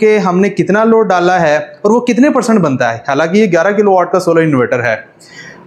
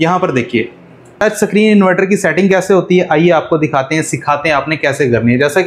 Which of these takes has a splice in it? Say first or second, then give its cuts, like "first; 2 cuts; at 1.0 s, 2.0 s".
second; 1 cut; at 1.1 s